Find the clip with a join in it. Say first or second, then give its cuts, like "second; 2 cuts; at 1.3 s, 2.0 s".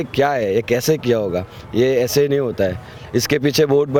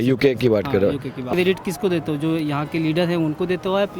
second; 1 cut; at 1.2 s